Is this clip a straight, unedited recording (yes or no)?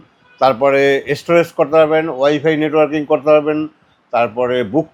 yes